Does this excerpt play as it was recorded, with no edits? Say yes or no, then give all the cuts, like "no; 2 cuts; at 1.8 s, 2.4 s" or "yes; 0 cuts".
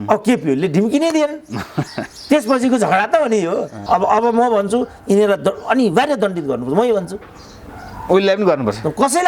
no; 1 cut; at 3.8 s